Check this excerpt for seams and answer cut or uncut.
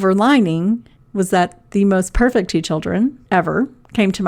cut